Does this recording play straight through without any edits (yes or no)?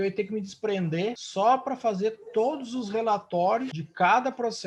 no